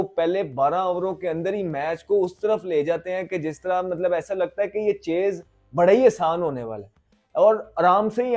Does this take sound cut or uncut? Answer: uncut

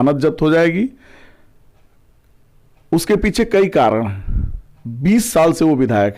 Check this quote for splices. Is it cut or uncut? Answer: uncut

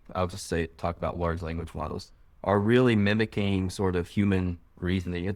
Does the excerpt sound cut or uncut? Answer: uncut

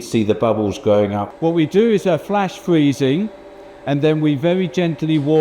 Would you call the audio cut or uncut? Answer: cut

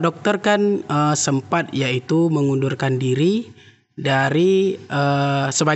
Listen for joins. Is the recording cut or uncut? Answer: uncut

